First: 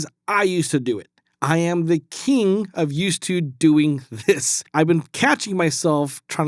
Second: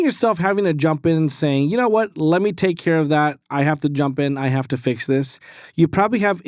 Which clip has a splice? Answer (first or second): first